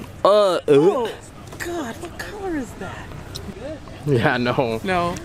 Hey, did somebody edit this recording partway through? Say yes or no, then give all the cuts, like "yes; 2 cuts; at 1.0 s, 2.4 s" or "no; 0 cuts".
yes; 1 cut; at 3.5 s